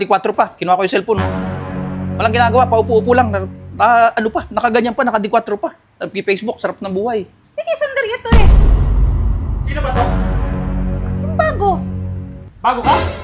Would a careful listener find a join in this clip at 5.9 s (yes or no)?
no